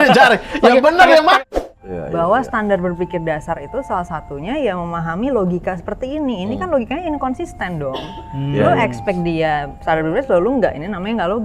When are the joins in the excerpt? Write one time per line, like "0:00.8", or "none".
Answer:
0:01.4